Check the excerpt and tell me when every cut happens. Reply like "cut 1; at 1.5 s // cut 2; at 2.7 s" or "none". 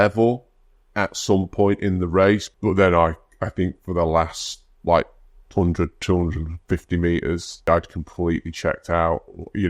cut 1; at 2.5 s // cut 2; at 7.7 s